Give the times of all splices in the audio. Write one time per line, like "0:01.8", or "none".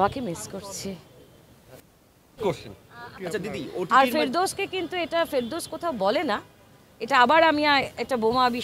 0:03.2